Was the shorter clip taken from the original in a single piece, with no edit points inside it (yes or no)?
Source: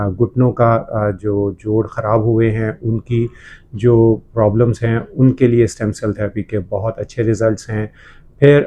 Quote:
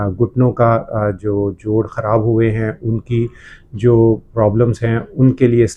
yes